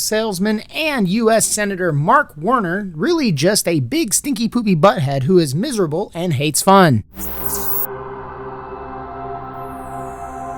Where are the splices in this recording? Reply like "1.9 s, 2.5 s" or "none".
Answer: 7.2 s